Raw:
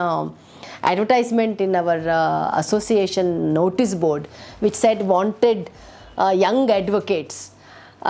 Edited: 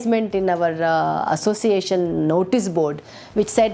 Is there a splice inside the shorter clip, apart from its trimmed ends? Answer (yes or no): no